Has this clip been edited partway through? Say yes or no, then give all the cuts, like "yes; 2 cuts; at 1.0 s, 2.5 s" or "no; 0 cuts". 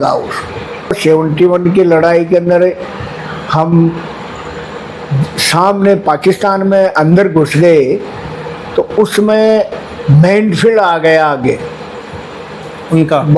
yes; 1 cut; at 1.0 s